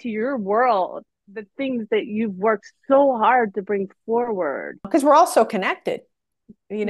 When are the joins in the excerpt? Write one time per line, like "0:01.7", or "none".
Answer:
0:04.8